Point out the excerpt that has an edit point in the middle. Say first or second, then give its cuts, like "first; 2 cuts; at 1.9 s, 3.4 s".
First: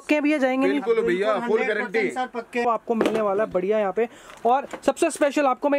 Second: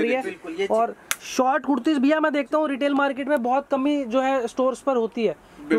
first; 1 cut; at 2.7 s